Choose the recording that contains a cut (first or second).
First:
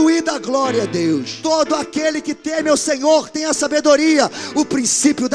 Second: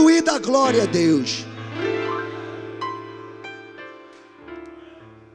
first